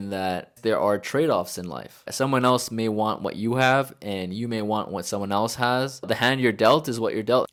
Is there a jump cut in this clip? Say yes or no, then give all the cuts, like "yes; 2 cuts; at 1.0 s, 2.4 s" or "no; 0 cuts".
no; 0 cuts